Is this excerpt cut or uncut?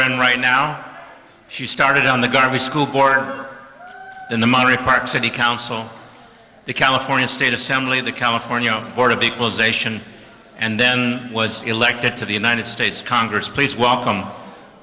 uncut